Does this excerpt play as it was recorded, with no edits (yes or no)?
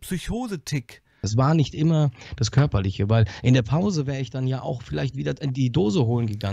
no